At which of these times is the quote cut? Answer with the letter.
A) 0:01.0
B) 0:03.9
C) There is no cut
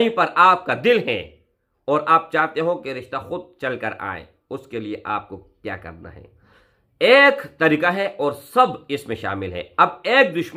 C